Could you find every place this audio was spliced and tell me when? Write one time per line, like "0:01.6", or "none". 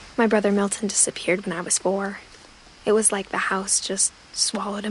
none